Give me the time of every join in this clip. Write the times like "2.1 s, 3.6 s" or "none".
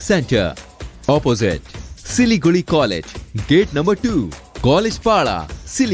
none